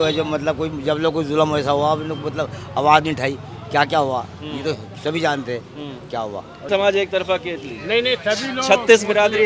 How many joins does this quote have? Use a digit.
1